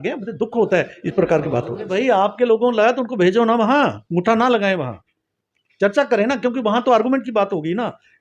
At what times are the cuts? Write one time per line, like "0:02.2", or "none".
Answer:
0:01.9

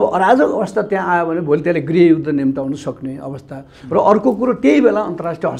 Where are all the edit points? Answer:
none

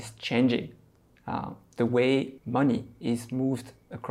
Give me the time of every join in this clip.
0:02.4

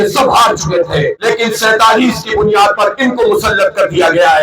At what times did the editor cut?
0:01.2

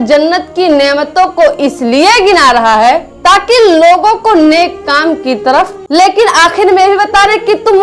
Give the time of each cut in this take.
0:05.8

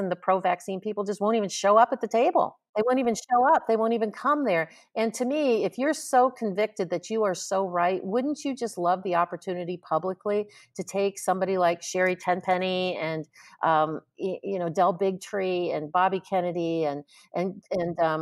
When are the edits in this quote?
0:02.6

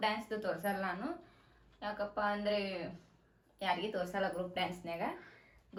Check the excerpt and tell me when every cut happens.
none

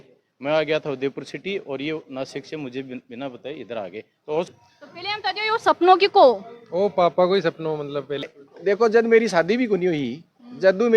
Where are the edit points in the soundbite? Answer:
0:04.5
0:08.4

